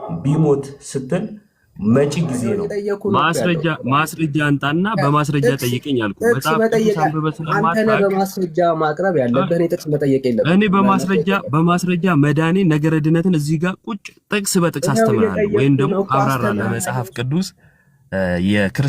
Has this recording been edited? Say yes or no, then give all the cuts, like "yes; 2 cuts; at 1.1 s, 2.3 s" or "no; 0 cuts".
yes; 2 cuts; at 2.6 s, 16.8 s